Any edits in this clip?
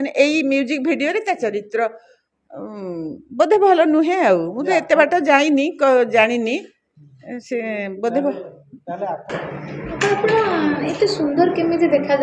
yes; 1 cut; at 9.2 s

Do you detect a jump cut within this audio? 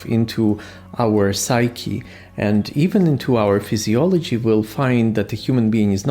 no; 0 cuts

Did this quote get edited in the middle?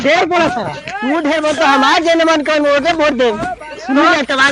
no; 0 cuts

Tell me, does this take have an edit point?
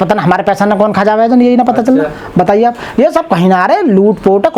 no; 0 cuts

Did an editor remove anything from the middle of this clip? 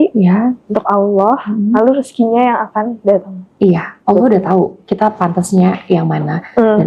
no; 0 cuts

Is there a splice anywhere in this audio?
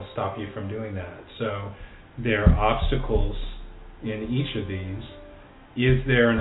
no; 0 cuts

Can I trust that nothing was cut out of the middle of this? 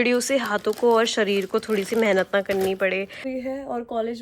no; 1 cut; at 3.3 s

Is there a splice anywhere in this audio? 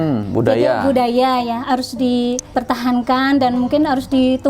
yes; 1 cut; at 2.5 s

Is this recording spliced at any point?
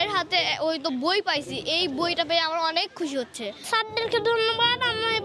yes; 1 cut; at 3.6 s

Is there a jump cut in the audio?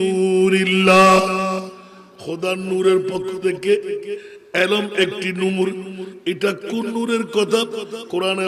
no; 0 cuts

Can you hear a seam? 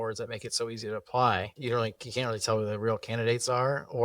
yes; 1 cut; at 1.5 s

